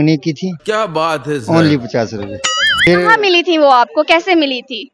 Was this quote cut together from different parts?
yes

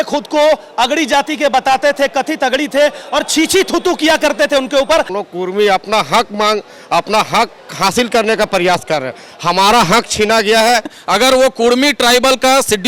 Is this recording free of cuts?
no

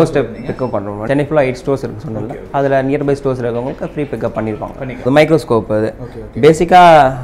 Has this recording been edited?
yes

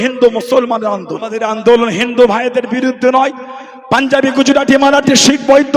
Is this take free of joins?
no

